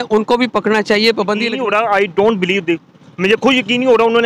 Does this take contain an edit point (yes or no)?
yes